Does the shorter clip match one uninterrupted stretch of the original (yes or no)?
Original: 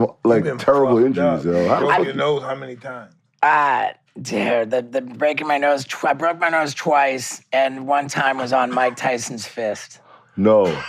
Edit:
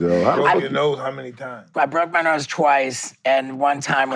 no